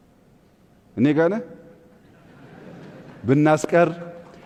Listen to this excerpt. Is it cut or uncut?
uncut